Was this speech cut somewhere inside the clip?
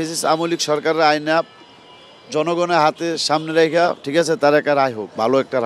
no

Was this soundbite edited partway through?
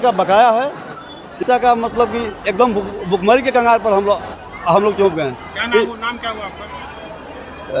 yes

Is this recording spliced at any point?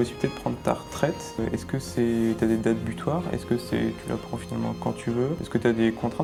no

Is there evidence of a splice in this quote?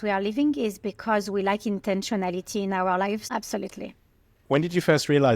yes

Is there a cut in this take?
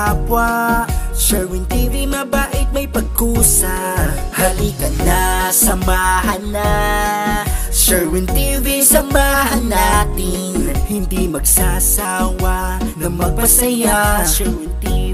no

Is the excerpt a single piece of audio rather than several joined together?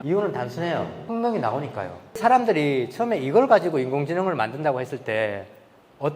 no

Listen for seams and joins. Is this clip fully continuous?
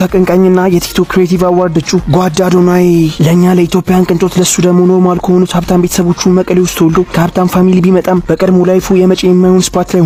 yes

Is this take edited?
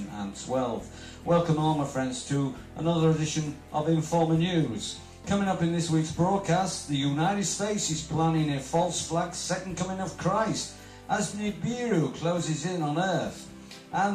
yes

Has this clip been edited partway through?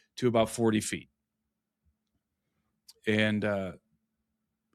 no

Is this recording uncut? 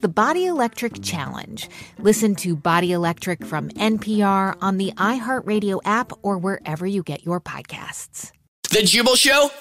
no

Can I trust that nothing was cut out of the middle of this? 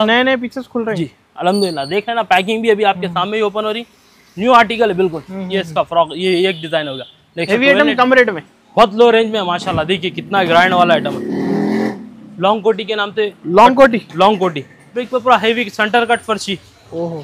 no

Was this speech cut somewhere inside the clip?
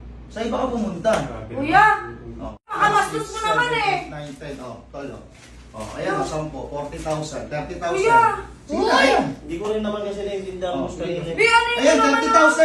yes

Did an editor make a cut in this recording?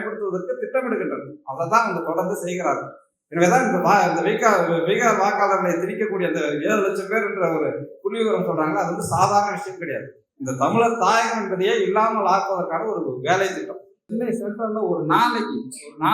yes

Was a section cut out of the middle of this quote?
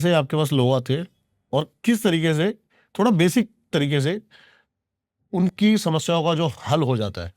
no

